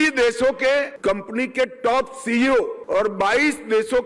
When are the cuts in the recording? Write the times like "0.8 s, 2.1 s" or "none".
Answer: 0.9 s, 2.8 s